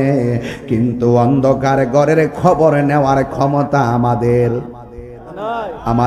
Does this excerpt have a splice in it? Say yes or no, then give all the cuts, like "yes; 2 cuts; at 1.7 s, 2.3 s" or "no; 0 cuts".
no; 0 cuts